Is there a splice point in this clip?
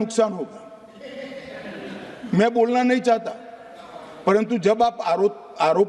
no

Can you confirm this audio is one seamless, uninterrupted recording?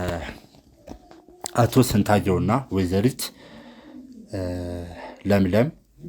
yes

